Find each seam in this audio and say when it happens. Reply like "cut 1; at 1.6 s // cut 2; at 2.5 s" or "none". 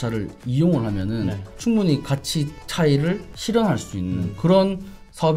cut 1; at 1.5 s // cut 2; at 3.3 s // cut 3; at 4.3 s